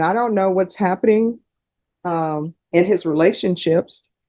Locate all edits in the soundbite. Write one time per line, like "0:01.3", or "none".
none